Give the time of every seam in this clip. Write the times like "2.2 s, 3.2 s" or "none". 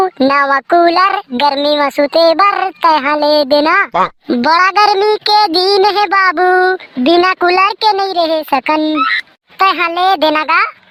none